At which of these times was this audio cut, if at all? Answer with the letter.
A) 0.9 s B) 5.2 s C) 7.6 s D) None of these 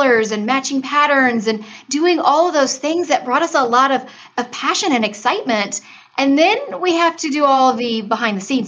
C